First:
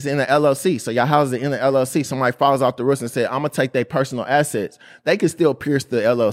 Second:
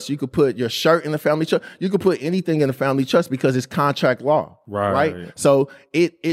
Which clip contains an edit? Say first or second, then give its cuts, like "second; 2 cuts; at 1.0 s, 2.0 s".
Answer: second; 1 cut; at 4.6 s